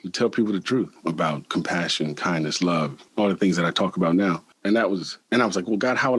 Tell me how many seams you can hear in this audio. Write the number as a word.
three